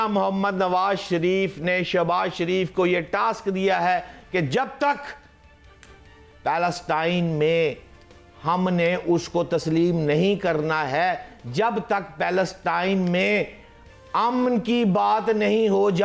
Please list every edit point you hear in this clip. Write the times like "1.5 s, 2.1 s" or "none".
none

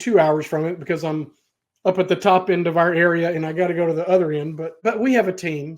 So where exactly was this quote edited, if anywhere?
4.8 s

